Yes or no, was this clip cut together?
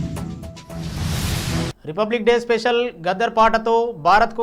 no